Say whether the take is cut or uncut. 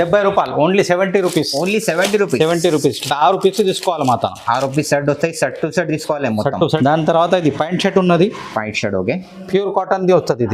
cut